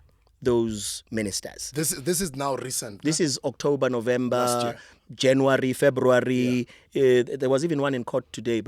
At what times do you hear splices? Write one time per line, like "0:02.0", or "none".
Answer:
none